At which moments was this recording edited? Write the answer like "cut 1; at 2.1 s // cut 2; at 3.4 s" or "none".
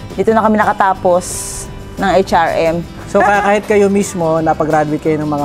cut 1; at 2.9 s